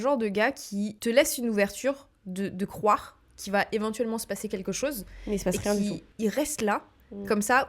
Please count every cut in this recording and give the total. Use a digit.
2